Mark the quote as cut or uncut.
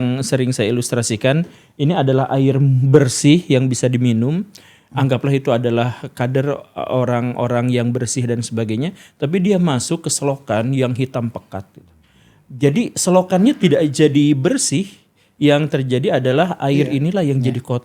uncut